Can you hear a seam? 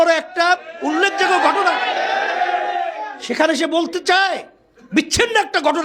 no; 0 cuts

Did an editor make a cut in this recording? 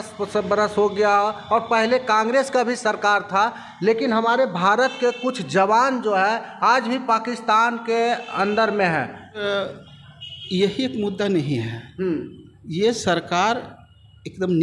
yes; 1 cut; at 9.4 s

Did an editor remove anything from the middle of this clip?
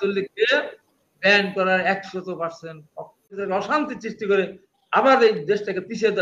yes; 1 cut; at 3.4 s

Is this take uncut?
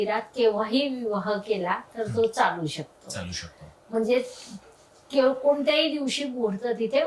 yes; 0 cuts

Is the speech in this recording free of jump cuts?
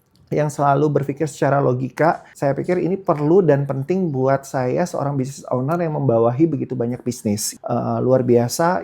no; 2 cuts; at 2.3 s, 7.5 s

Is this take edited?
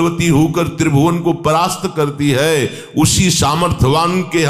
no; 0 cuts

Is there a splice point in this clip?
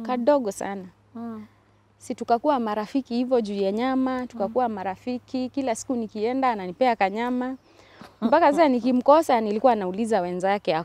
no; 0 cuts

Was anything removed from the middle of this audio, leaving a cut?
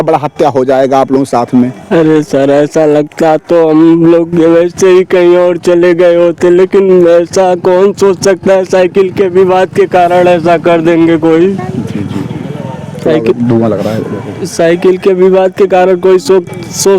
no; 0 cuts

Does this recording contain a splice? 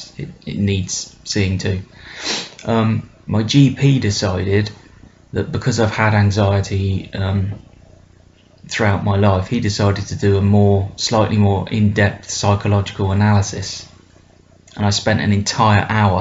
yes; 1 cut; at 7.9 s

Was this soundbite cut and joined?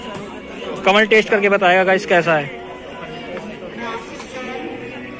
no; 0 cuts

